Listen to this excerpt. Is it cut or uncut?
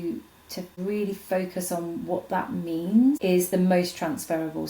cut